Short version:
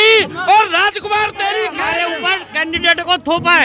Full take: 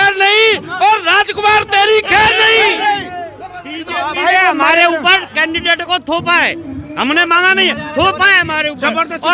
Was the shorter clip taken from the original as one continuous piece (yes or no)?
no